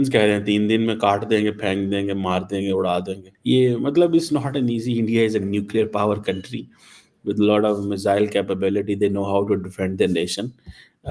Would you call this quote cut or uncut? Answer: uncut